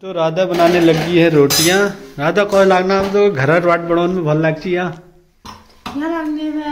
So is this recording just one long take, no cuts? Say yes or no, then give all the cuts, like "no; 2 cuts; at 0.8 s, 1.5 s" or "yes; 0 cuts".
yes; 0 cuts